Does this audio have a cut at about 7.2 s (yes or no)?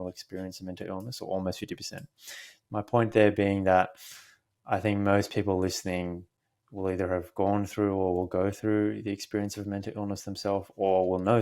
no